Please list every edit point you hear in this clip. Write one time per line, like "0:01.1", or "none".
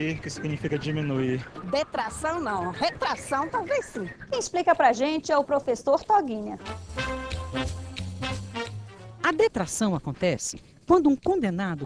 none